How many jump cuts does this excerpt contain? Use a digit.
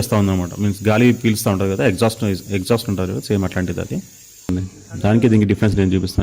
1